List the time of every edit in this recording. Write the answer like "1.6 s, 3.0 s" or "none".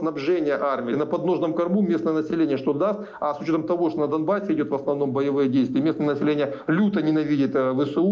0.9 s